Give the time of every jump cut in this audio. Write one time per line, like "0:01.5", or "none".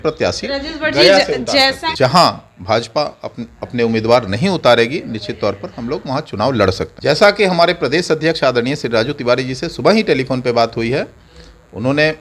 0:01.9
0:06.9